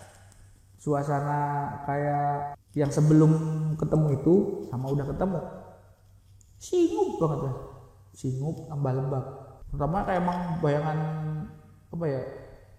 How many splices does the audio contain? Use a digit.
2